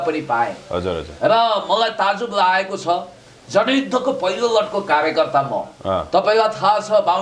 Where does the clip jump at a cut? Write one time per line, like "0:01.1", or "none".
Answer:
none